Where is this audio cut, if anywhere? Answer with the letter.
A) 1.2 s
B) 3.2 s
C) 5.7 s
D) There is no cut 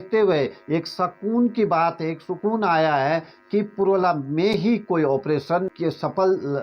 C